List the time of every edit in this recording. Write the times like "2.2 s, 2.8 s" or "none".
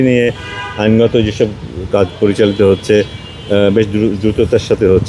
none